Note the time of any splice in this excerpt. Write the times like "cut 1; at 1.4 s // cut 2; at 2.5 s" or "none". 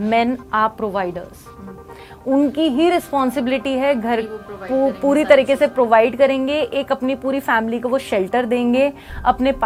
none